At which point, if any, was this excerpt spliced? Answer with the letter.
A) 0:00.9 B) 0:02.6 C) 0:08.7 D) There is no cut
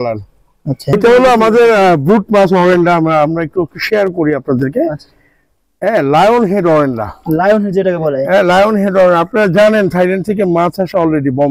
A